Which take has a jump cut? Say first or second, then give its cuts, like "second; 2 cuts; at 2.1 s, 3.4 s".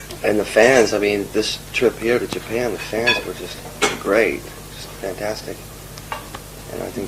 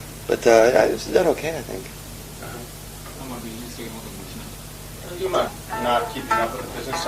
second; 1 cut; at 4.4 s